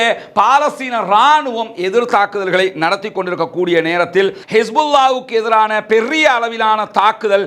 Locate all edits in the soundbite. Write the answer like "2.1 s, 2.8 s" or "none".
4.4 s